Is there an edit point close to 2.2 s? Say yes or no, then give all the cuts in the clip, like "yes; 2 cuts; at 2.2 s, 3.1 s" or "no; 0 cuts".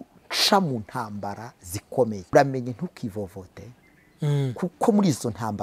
yes; 1 cut; at 2.2 s